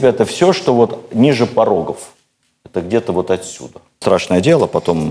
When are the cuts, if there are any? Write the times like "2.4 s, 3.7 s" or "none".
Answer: 4.0 s